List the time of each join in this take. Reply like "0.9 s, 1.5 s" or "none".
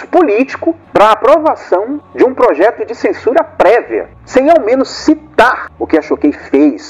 4.1 s